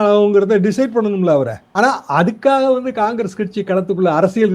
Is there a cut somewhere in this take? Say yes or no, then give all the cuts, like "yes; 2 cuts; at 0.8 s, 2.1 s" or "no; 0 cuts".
yes; 1 cut; at 1.6 s